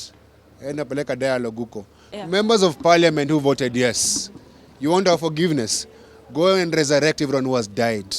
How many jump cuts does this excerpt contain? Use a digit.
1